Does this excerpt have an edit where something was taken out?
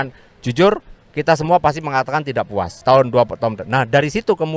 yes; 1 cut; at 2.8 s

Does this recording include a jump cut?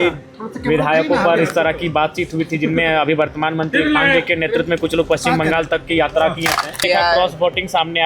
yes; 1 cut; at 6.8 s

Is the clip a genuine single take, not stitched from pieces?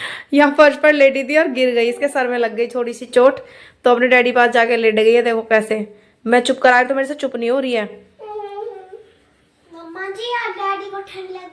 yes; 0 cuts

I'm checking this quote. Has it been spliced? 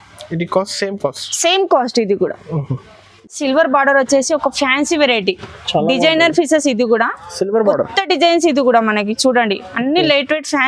yes; 1 cut; at 3.4 s

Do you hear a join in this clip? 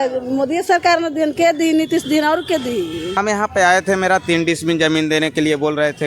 yes; 1 cut; at 3.2 s

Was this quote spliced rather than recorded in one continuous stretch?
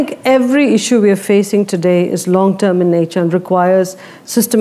no; 0 cuts

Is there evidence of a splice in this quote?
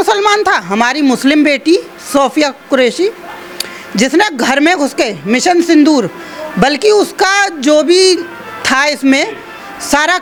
no; 0 cuts

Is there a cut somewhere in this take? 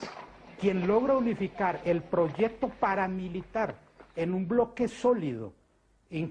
yes; 1 cut; at 3.1 s

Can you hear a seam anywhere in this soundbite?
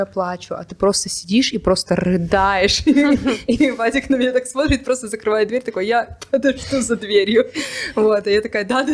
no; 0 cuts

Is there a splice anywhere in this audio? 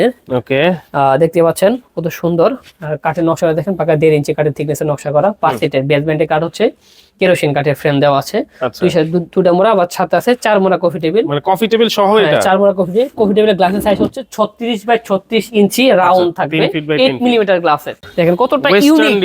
yes; 1 cut; at 18.0 s

